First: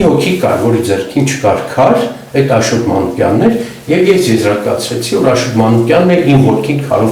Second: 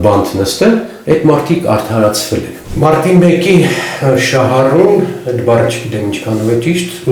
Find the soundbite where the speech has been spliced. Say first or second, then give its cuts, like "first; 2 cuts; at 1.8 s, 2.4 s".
second; 1 cut; at 2.6 s